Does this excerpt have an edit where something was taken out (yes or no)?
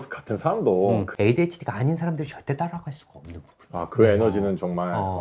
yes